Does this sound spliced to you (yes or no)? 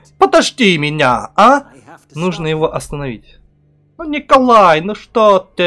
no